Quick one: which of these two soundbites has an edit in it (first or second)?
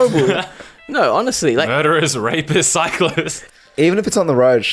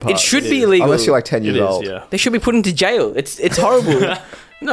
first